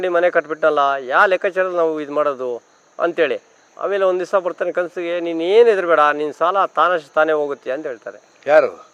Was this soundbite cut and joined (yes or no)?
no